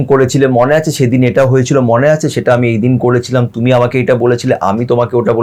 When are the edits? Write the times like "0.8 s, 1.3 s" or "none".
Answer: none